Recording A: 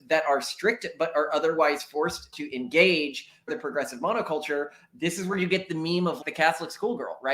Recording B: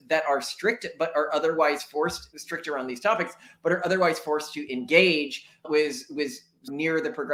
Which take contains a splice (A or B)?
A